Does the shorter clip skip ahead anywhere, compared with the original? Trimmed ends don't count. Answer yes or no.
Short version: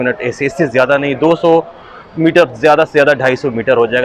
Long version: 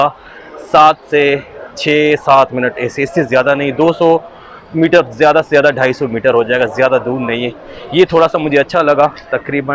no